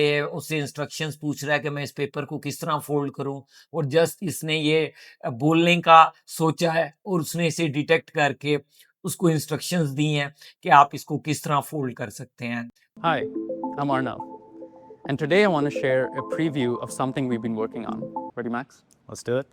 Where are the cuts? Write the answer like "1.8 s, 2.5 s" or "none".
12.7 s, 18.3 s

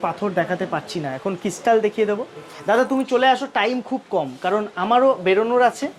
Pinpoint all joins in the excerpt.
none

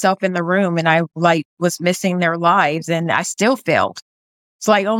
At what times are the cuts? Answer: none

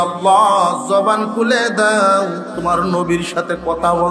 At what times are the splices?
none

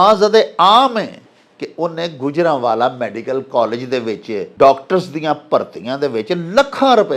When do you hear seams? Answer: 4.5 s

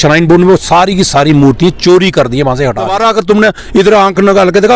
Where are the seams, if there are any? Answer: 2.9 s

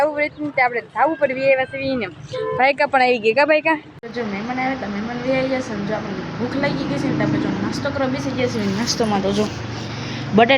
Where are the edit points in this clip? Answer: 3.9 s

